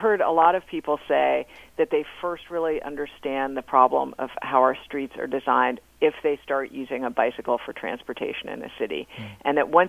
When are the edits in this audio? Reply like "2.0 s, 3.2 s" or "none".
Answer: none